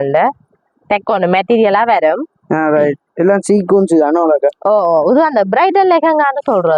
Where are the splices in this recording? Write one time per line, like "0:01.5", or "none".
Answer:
none